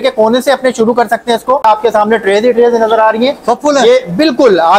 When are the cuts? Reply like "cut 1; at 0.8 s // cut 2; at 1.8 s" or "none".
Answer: cut 1; at 1.6 s